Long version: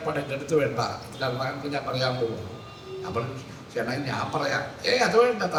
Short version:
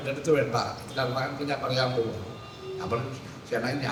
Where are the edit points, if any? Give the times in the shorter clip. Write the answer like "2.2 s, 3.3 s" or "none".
none